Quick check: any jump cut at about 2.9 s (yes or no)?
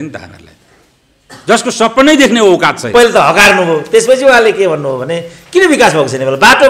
yes